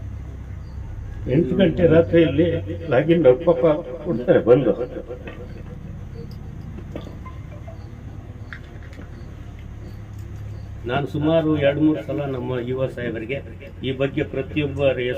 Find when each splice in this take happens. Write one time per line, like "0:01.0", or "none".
0:10.8